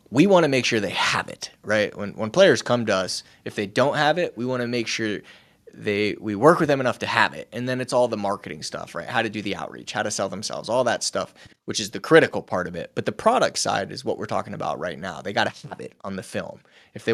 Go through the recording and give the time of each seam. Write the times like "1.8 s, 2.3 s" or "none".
none